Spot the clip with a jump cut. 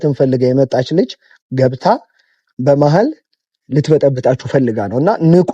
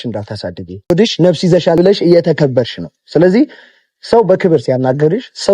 second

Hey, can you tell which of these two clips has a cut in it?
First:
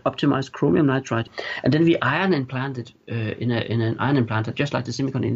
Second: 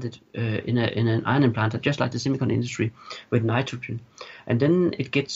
first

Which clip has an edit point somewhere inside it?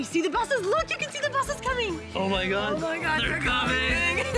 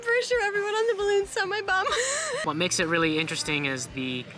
second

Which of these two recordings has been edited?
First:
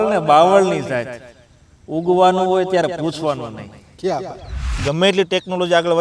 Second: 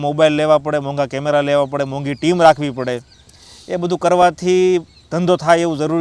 first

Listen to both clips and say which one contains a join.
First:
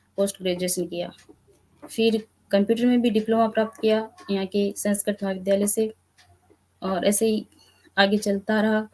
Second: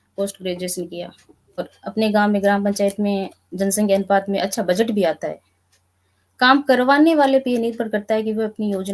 second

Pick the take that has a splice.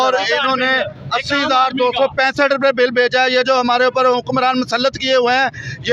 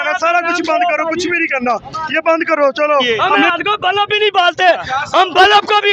second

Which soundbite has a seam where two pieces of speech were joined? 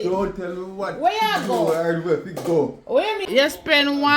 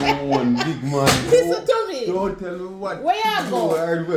first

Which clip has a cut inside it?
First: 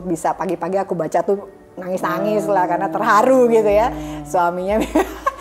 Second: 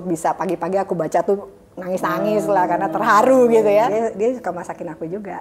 second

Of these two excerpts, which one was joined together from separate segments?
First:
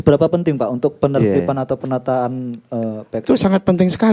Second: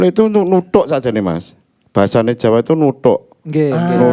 first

